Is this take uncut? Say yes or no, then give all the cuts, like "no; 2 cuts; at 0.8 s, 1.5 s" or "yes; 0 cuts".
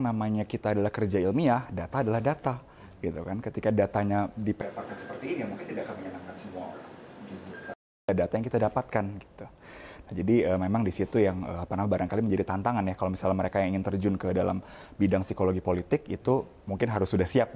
yes; 0 cuts